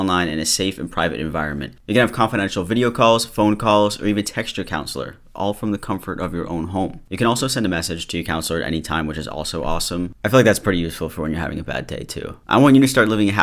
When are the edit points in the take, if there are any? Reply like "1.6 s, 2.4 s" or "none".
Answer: 1.7 s, 7.0 s, 12.3 s